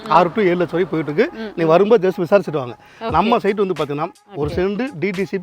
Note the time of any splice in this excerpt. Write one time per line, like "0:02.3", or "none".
0:04.2